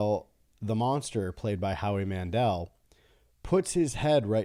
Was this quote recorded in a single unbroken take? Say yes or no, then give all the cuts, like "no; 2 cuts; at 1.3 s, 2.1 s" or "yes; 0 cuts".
yes; 0 cuts